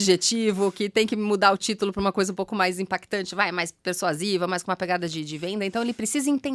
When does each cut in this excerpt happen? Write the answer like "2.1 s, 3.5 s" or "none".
none